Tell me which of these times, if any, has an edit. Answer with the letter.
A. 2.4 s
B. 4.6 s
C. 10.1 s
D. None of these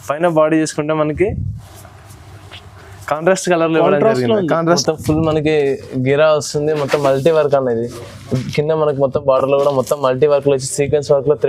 B